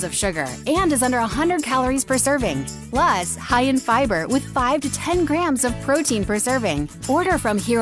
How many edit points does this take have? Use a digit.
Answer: 2